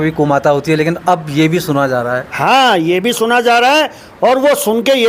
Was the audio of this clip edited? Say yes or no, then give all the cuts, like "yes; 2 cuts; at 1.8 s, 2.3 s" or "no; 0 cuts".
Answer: no; 0 cuts